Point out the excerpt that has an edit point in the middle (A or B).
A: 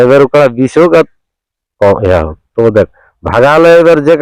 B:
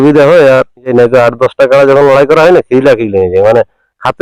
B